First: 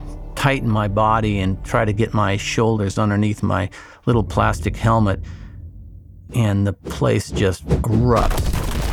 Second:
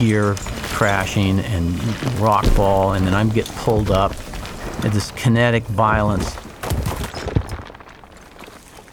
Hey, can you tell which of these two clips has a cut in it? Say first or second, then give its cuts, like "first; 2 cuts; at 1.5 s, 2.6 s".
second; 1 cut; at 6.2 s